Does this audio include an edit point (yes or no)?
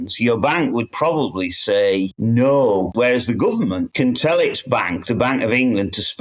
yes